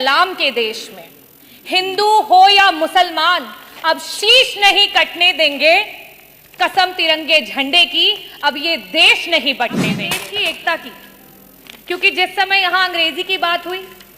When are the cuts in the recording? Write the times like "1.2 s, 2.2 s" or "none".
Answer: 9.9 s